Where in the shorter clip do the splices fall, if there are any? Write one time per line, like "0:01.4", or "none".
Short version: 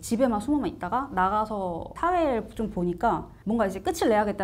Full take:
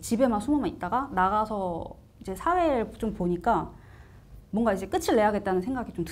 0:01.9
0:03.3